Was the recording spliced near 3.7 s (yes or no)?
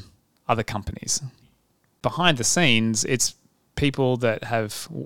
no